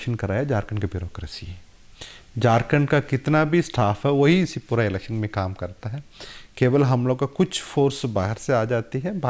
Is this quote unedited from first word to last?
yes; 0 cuts

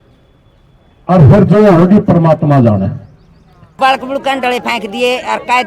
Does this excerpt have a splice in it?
yes; 1 cut; at 3.6 s

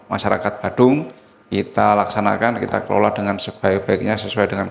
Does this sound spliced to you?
no; 0 cuts

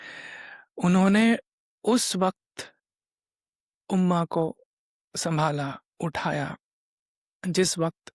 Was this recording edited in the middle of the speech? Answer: no; 0 cuts

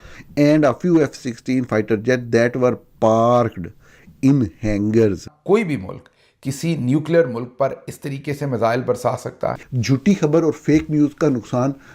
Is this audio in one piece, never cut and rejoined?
no; 2 cuts; at 5.3 s, 9.7 s

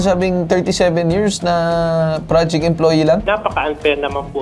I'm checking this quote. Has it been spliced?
yes; 1 cut; at 3.2 s

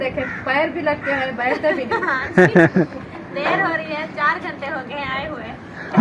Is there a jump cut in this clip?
no; 0 cuts

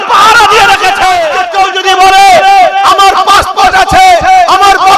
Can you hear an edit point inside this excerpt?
yes; 1 cut; at 1.4 s

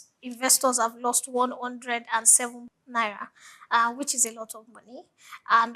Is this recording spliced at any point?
yes; 1 cut; at 2.7 s

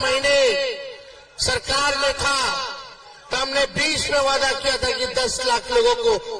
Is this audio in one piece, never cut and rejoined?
yes; 0 cuts

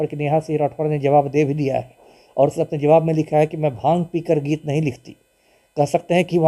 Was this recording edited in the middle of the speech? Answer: no; 0 cuts

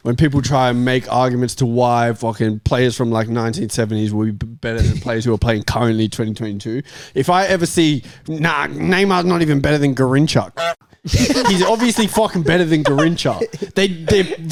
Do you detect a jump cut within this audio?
no; 0 cuts

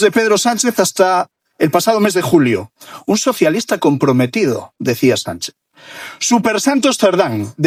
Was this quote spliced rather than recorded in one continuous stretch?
no; 0 cuts

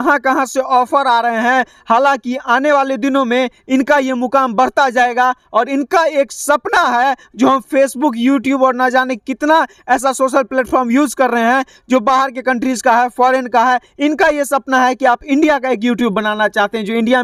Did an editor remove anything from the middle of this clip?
no; 0 cuts

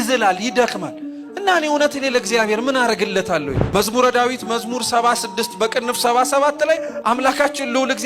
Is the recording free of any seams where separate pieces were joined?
no; 1 cut; at 3.6 s

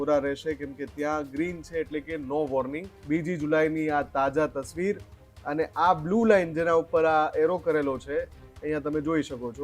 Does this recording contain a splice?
yes; 1 cut; at 2.9 s

